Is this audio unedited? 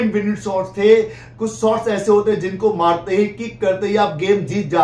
yes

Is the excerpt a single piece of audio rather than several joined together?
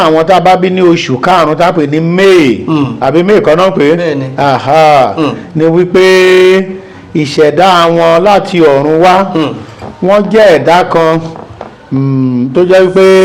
yes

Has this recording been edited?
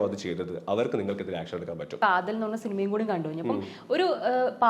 yes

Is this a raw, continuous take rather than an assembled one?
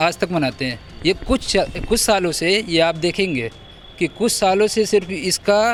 yes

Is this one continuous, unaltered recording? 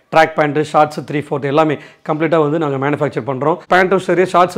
no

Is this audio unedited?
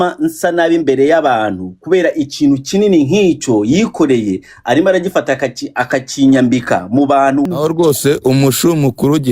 no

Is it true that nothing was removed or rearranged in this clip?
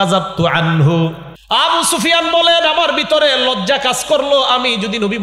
no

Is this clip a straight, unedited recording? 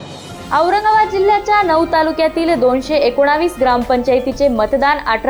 yes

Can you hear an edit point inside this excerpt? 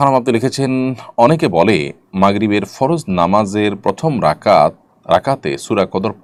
no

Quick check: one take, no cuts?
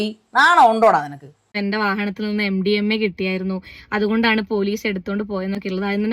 no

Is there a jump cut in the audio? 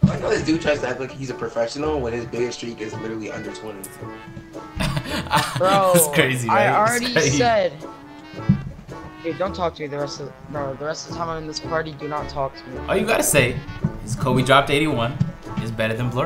yes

